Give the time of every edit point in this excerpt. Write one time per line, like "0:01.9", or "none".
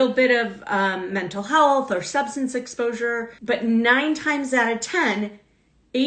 0:03.3